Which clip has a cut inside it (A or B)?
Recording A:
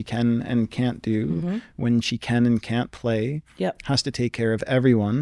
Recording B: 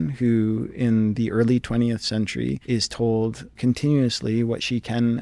B